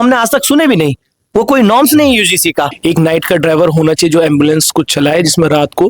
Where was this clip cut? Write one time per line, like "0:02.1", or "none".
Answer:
0:02.7